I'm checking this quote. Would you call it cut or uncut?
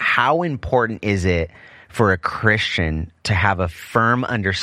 uncut